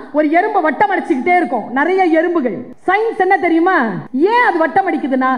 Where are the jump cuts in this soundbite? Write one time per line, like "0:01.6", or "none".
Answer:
0:02.7
0:04.0